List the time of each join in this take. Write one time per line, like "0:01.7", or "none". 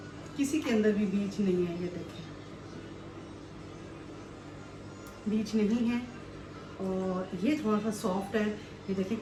none